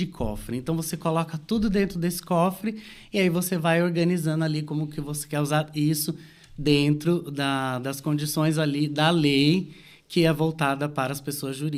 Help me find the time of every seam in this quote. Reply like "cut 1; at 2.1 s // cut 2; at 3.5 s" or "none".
none